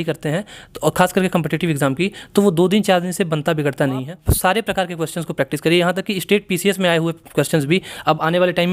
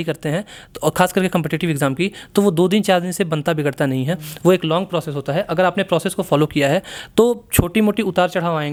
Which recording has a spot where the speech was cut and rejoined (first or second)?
first